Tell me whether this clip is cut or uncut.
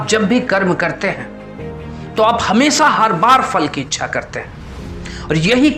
uncut